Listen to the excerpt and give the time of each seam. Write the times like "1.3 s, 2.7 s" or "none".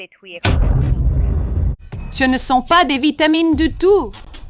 1.7 s